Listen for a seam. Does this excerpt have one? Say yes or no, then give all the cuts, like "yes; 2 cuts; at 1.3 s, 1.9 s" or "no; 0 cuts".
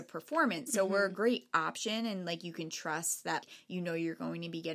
yes; 1 cut; at 3.4 s